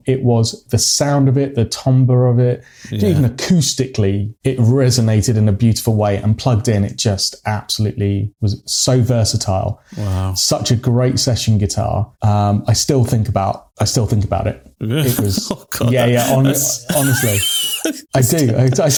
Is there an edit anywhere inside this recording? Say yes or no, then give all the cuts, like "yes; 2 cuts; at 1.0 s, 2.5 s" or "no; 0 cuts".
no; 0 cuts